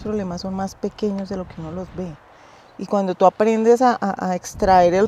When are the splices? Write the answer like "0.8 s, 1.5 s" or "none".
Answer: none